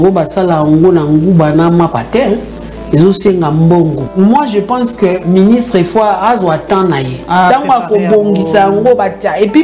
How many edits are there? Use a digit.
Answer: 1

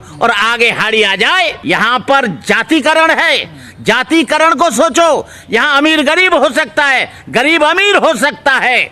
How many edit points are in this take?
1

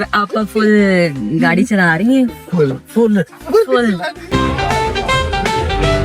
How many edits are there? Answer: 1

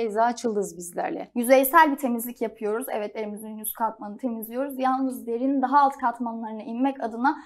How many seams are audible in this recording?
1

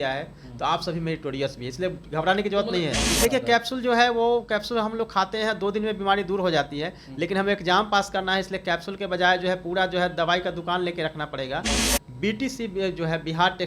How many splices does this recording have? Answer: 2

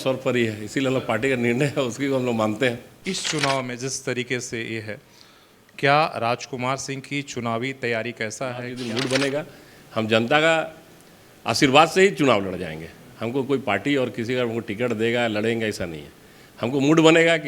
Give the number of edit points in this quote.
2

